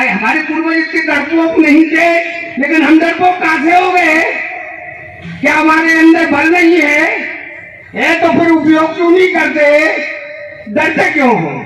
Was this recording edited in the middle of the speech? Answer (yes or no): no